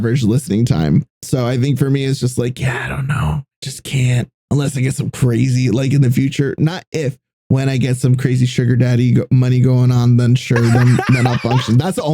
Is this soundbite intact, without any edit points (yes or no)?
no